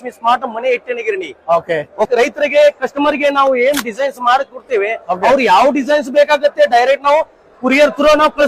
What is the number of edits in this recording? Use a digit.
1